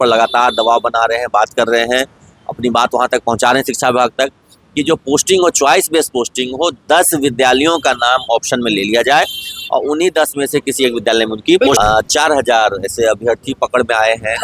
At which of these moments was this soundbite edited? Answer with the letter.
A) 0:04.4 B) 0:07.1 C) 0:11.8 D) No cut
C